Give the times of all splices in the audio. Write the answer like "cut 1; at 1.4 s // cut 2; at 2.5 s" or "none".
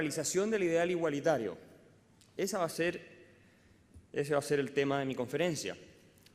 cut 1; at 1.6 s